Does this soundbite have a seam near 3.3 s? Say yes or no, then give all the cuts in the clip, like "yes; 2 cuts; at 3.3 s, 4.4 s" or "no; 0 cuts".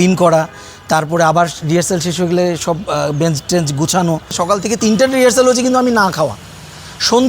no; 1 cut; at 4.8 s